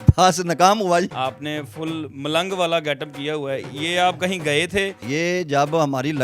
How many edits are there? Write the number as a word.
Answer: two